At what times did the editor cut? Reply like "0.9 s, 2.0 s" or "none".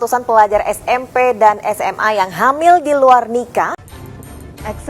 3.8 s